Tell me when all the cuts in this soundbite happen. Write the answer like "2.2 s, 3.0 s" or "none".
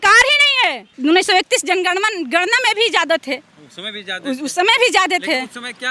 0.9 s